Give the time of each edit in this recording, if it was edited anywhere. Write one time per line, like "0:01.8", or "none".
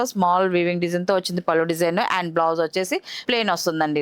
0:03.1